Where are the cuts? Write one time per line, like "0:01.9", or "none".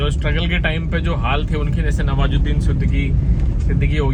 none